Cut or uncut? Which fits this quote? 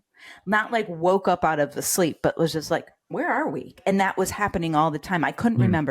cut